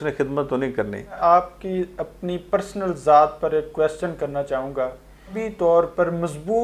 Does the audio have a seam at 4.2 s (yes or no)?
no